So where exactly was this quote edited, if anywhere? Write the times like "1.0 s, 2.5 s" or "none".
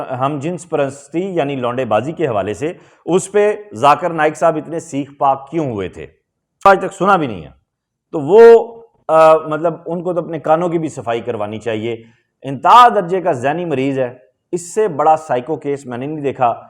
6.7 s